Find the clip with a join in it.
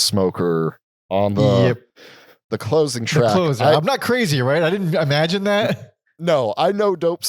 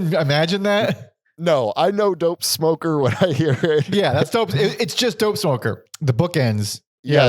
second; 1 cut; at 5.9 s

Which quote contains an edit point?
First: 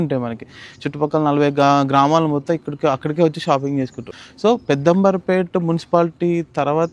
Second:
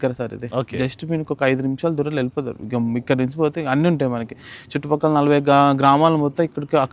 first; 1 cut; at 4.0 s

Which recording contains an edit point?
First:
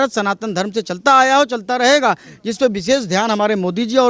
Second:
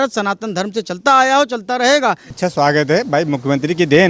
second; 1 cut; at 2.3 s

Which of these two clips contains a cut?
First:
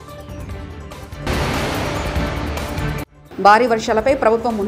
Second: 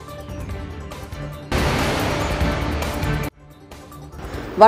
first; 2 cuts; at 1.2 s, 3.2 s

